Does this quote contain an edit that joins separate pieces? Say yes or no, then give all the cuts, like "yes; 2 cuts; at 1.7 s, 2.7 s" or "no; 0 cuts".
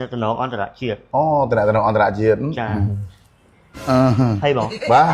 no; 0 cuts